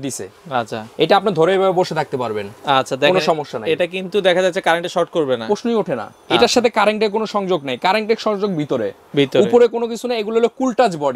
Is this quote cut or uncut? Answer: uncut